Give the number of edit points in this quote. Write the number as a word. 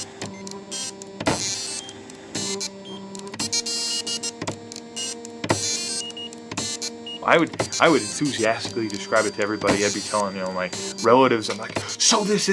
one